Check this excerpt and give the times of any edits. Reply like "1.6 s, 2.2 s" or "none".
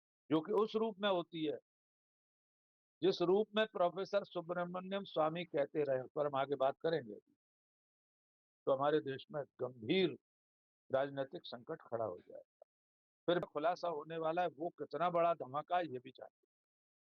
13.4 s